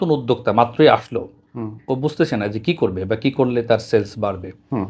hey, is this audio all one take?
yes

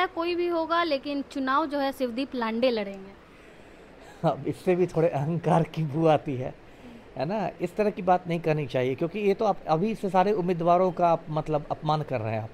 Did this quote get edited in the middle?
no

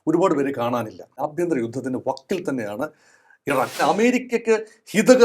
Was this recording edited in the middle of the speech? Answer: yes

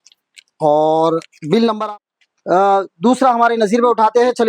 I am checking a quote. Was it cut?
yes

